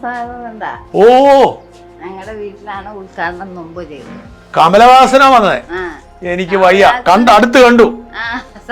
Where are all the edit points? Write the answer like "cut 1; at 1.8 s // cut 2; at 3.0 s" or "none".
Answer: none